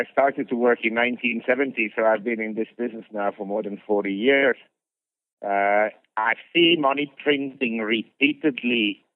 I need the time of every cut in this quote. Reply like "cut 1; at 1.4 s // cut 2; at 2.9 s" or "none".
cut 1; at 5.3 s